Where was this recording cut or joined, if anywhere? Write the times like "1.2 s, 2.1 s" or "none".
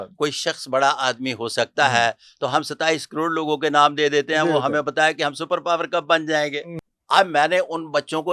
6.7 s